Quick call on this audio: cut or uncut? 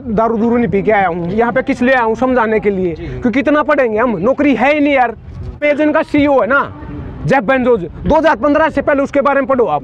cut